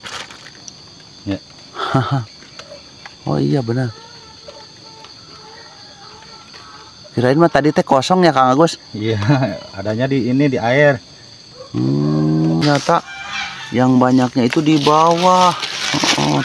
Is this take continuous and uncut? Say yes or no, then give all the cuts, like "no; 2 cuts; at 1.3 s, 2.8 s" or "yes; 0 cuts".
no; 1 cut; at 12.6 s